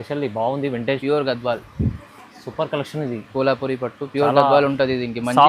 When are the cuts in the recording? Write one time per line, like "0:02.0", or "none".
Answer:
0:01.0